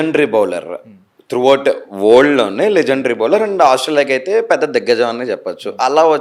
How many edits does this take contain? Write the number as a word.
zero